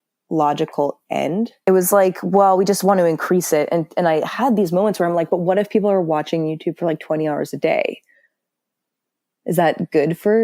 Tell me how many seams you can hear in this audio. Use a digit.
1